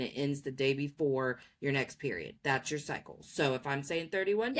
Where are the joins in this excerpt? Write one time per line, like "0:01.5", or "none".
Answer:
none